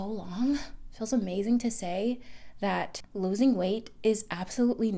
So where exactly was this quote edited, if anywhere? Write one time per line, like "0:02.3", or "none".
0:03.0